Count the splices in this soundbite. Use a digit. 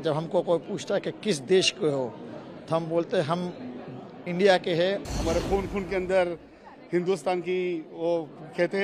1